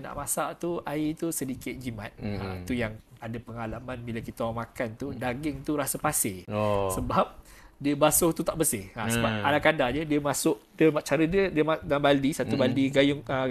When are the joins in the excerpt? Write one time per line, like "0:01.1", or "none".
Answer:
none

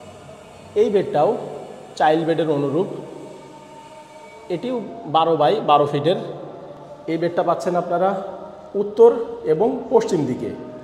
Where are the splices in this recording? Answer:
none

